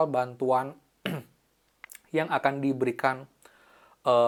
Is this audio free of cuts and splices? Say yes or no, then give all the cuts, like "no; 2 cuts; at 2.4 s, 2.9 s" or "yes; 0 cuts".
yes; 0 cuts